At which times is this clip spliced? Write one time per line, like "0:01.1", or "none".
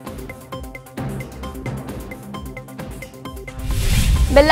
0:03.4